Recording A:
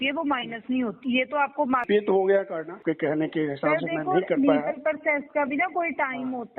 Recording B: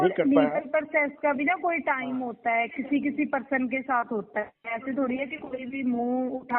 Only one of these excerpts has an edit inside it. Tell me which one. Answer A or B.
A